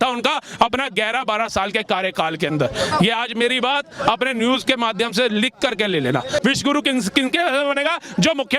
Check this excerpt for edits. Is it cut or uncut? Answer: cut